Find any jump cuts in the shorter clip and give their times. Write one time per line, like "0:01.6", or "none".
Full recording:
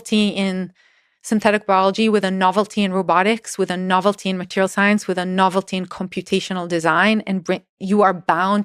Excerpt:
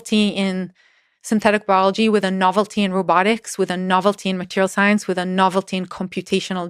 none